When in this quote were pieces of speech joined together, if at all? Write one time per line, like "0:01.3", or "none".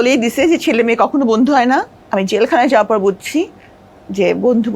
0:02.0

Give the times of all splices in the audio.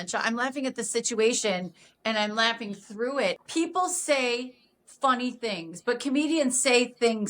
0:03.4

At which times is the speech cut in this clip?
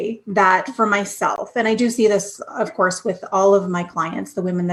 none

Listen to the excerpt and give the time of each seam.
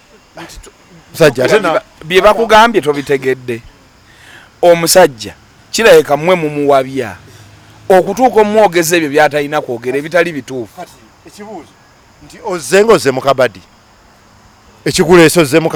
none

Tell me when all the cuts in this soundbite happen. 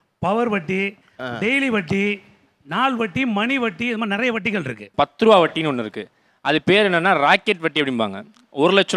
0:04.8

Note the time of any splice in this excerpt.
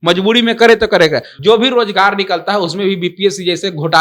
0:01.3

